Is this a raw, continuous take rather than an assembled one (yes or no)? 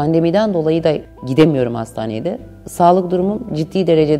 no